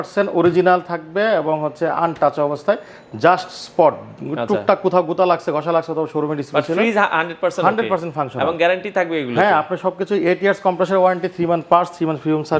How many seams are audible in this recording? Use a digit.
0